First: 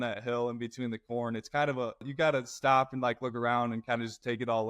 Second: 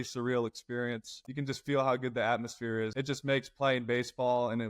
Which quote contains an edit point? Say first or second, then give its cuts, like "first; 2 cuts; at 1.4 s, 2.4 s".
second; 1 cut; at 1.2 s